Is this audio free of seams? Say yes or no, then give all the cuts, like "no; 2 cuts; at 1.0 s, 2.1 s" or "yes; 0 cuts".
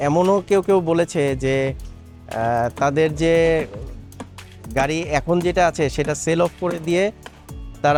yes; 0 cuts